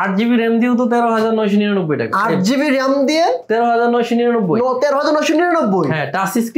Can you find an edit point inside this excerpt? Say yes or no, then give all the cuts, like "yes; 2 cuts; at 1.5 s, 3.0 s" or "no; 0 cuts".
no; 0 cuts